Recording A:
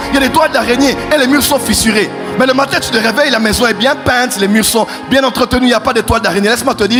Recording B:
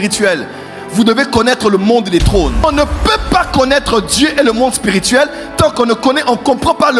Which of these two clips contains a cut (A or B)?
B